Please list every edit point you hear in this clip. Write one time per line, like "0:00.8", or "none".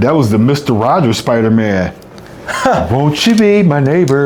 none